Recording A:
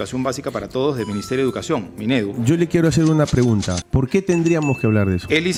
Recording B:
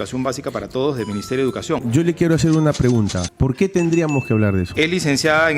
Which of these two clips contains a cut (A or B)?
B